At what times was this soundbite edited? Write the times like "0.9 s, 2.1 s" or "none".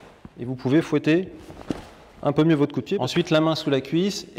3.0 s